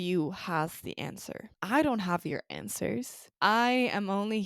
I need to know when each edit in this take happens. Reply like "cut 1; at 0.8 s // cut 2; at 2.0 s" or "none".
cut 1; at 1.5 s // cut 2; at 3.2 s